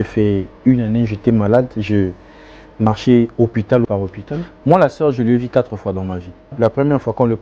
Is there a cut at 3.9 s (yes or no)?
yes